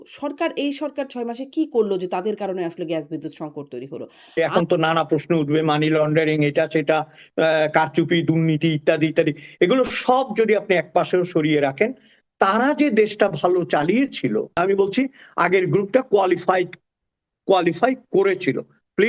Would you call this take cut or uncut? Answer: cut